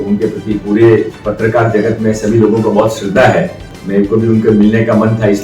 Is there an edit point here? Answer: yes; 2 cuts; at 1.2 s, 3.7 s

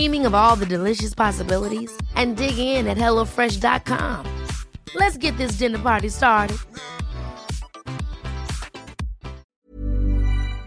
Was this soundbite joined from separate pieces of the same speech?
yes; 1 cut; at 9.4 s

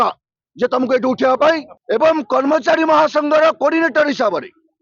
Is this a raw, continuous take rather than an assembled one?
no; 1 cut; at 1.7 s

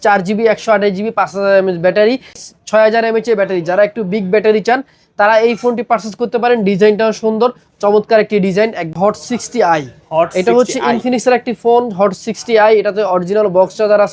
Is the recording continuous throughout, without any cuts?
no; 2 cuts; at 2.5 s, 8.9 s

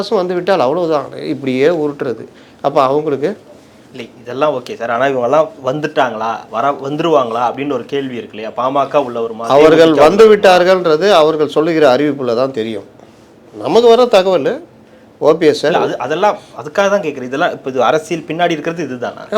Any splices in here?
no; 0 cuts

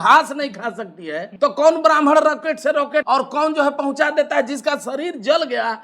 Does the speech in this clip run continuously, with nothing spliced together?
no; 2 cuts; at 1.2 s, 3.1 s

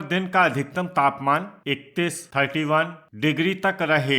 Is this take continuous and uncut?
no; 2 cuts; at 1.6 s, 3.0 s

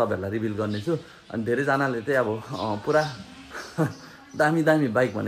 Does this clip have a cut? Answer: no; 0 cuts

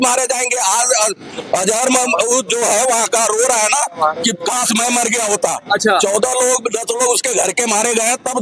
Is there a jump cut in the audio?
no; 0 cuts

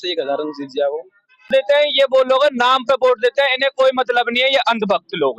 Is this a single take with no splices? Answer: no; 1 cut; at 1.5 s

